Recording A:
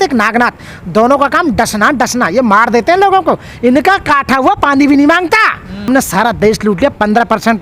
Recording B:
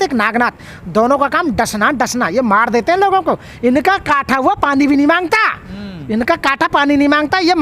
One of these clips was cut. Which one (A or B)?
A